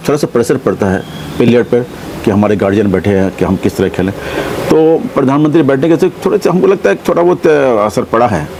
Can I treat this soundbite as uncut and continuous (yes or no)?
yes